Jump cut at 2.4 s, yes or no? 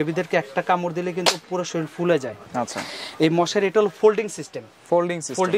no